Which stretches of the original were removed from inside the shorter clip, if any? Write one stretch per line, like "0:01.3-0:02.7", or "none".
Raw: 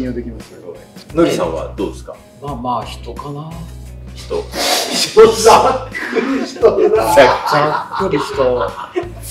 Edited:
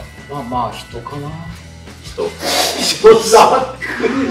none